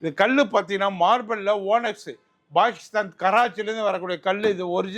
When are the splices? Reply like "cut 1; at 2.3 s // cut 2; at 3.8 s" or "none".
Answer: none